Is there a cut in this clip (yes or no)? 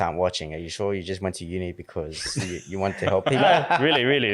yes